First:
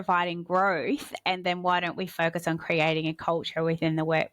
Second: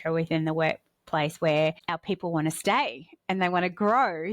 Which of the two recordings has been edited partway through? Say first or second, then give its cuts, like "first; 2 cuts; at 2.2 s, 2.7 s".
second; 1 cut; at 1.9 s